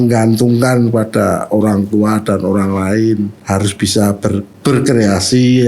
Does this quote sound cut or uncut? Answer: cut